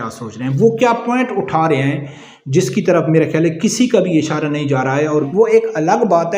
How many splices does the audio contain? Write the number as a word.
one